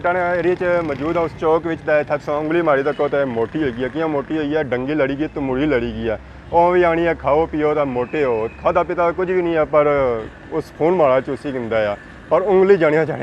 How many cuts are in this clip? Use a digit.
0